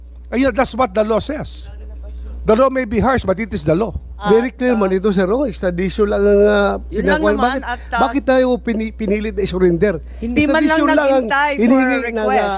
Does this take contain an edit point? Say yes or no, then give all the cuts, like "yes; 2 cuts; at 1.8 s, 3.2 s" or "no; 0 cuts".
yes; 1 cut; at 4.3 s